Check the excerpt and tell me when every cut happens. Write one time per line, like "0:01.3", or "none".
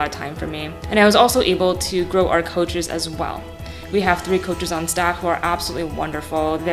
none